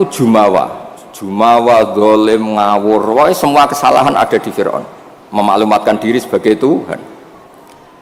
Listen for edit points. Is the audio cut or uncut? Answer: uncut